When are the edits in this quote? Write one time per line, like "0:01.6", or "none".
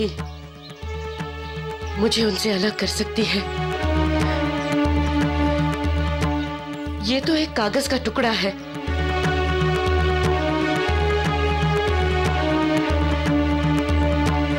none